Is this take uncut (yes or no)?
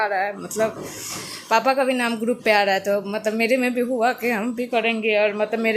yes